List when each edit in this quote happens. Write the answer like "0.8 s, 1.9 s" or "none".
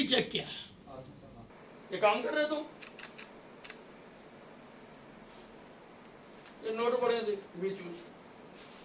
1.5 s